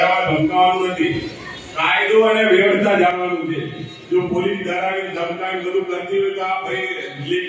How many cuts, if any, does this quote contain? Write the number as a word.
zero